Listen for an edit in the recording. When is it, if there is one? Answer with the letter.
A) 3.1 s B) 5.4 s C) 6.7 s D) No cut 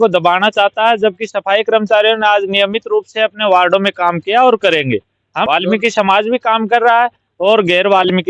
B